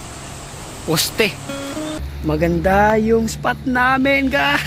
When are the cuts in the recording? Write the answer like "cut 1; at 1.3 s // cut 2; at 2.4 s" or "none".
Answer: cut 1; at 2.0 s